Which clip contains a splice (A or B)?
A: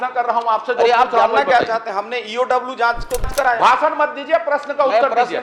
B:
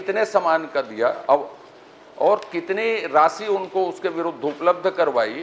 A